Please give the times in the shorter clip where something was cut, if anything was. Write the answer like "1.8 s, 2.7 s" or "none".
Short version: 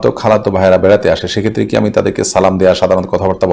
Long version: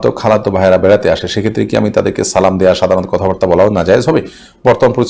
none